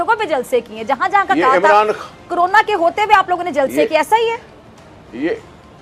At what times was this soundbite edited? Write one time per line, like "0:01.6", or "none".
none